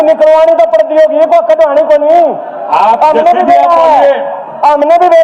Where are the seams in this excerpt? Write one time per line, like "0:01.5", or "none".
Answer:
none